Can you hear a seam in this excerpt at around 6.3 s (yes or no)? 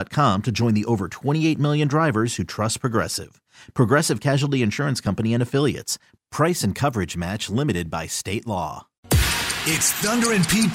no